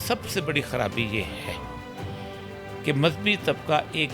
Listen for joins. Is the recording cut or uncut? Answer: uncut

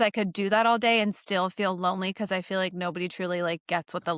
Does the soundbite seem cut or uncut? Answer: uncut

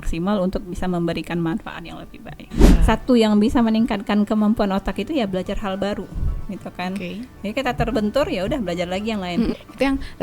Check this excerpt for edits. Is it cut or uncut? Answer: cut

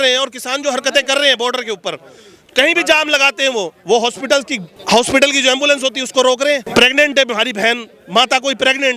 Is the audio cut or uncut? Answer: cut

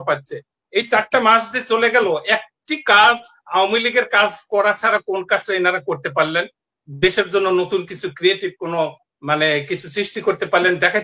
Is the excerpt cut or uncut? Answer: uncut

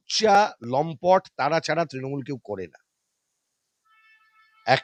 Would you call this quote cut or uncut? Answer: uncut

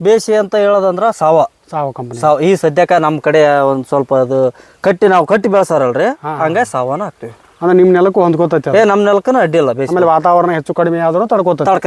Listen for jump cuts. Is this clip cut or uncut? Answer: uncut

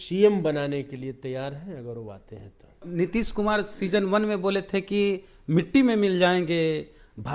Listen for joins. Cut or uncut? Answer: cut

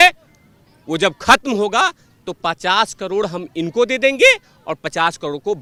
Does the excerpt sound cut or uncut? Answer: uncut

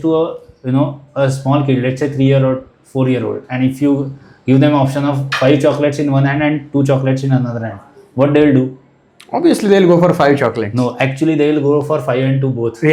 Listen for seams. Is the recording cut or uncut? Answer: uncut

